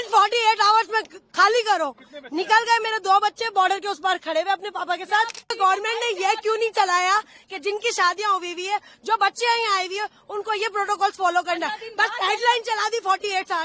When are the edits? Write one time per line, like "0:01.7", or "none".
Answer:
0:05.6